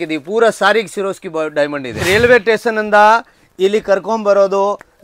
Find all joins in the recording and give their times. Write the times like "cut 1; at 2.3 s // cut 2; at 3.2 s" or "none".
cut 1; at 2.0 s